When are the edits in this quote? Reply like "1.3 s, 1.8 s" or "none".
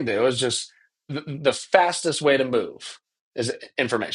1.1 s